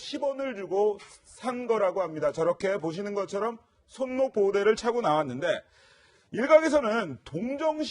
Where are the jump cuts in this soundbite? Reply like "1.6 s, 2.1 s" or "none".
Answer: 6.2 s